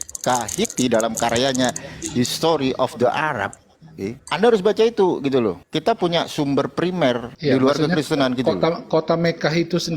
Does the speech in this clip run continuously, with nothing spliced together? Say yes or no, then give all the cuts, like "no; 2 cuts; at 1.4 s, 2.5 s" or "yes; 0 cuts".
no; 3 cuts; at 4.2 s, 5.7 s, 7.3 s